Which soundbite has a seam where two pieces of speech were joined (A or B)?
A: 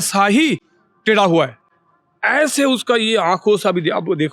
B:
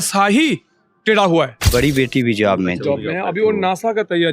B